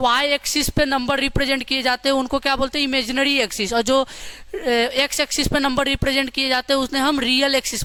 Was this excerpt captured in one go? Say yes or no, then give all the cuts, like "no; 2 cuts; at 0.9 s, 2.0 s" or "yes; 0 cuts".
yes; 0 cuts